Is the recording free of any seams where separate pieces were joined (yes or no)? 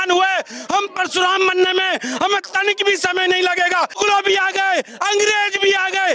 no